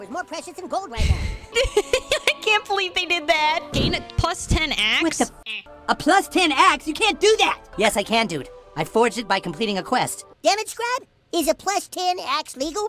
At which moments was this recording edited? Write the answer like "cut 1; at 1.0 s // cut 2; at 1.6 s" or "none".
cut 1; at 1.5 s // cut 2; at 3.7 s // cut 3; at 7.7 s // cut 4; at 10.2 s